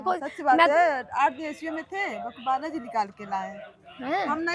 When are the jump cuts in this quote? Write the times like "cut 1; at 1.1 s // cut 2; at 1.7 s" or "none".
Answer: none